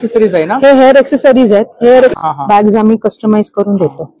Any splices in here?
yes; 1 cut; at 2.1 s

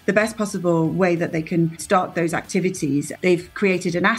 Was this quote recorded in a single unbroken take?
no; 2 cuts; at 1.8 s, 3.1 s

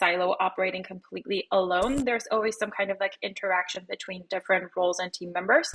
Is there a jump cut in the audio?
no; 0 cuts

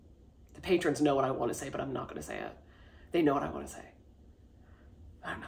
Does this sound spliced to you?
no; 0 cuts

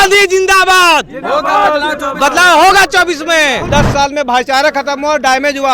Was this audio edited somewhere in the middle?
yes; 1 cut; at 3.7 s

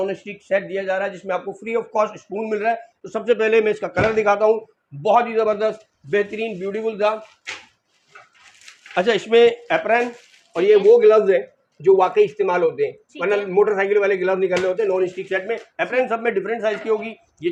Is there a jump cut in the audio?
no; 0 cuts

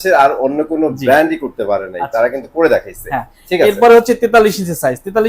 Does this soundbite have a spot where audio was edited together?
no; 0 cuts

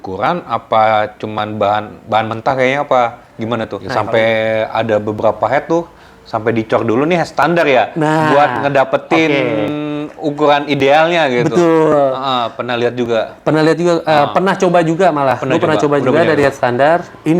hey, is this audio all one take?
no; 1 cut; at 3.8 s

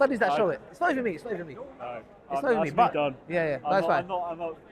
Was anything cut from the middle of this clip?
no; 0 cuts

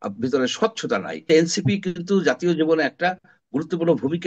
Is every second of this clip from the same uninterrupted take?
no; 1 cut; at 1.3 s

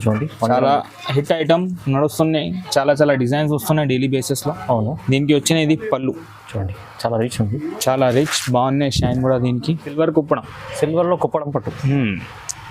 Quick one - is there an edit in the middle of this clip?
yes; 1 cut; at 9.9 s

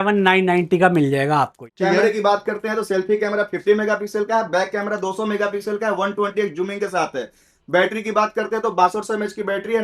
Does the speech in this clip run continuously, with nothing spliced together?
no; 1 cut; at 1.6 s

